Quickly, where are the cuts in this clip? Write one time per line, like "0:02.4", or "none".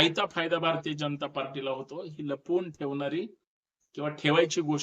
none